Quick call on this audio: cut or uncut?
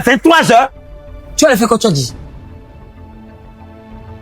cut